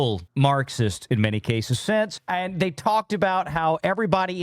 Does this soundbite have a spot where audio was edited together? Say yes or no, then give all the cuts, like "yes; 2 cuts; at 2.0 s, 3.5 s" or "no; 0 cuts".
yes; 1 cut; at 2.2 s